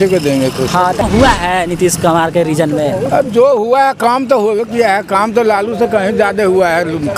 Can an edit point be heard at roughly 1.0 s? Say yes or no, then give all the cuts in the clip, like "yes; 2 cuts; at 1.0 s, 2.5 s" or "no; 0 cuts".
yes; 1 cut; at 1.0 s